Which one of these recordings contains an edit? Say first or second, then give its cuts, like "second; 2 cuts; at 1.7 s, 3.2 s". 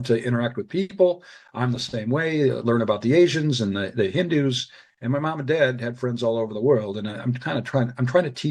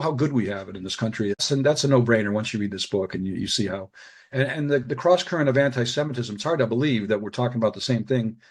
second; 1 cut; at 1.4 s